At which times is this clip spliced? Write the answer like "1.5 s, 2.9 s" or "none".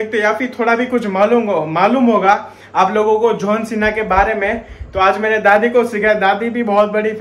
none